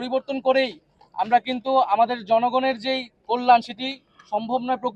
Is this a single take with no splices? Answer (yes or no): yes